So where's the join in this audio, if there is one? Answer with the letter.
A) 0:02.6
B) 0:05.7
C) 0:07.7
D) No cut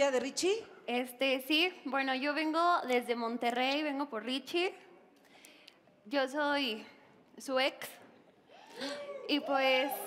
B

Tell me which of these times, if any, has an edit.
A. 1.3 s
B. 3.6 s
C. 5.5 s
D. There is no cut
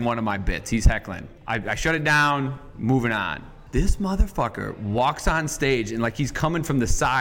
B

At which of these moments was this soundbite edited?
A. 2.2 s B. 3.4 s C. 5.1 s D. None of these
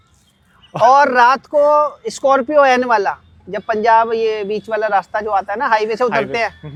D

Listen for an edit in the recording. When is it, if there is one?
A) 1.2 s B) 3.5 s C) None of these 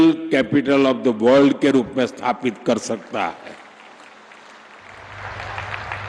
C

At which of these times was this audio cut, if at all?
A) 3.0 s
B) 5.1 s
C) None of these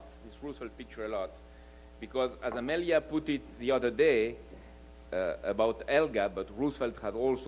A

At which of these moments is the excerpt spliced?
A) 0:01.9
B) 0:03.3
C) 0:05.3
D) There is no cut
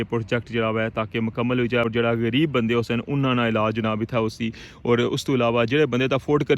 A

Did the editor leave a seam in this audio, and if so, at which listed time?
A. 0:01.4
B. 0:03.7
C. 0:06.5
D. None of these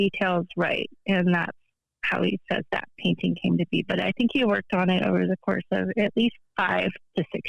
C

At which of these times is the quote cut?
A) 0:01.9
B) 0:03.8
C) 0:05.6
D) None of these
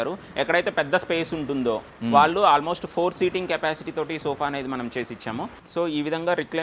C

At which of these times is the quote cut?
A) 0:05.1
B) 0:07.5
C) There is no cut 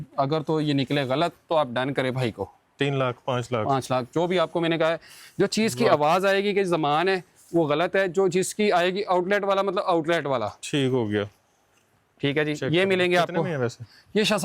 C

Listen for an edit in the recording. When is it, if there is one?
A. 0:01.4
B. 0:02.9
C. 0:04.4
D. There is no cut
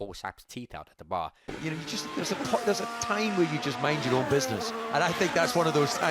A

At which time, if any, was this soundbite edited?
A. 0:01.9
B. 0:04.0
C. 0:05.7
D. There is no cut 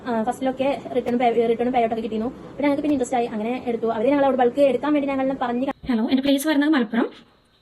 C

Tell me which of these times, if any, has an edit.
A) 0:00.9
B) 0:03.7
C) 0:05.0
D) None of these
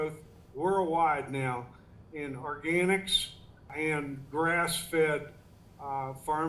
B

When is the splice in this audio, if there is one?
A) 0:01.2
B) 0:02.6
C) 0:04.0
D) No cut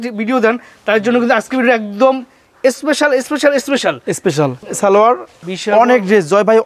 D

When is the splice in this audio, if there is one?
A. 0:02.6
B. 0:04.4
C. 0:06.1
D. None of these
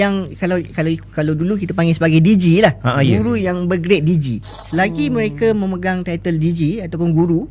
B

